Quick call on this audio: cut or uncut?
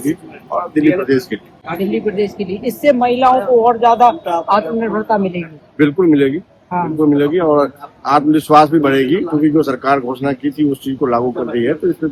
uncut